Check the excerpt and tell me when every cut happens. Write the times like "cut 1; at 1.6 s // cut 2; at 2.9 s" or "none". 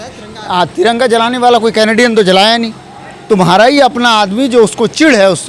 none